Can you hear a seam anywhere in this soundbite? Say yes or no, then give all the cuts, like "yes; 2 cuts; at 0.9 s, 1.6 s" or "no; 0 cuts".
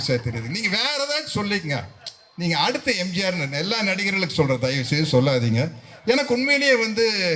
no; 0 cuts